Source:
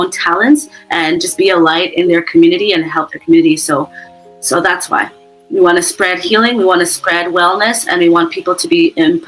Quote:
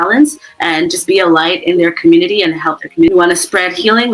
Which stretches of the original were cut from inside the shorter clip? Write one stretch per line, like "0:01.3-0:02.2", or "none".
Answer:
0:03.4-0:05.5